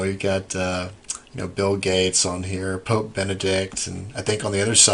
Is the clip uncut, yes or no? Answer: no